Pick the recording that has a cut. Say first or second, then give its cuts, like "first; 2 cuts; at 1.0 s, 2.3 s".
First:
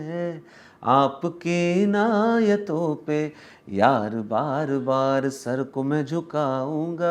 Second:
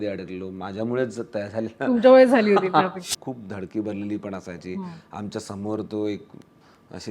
second; 1 cut; at 3.0 s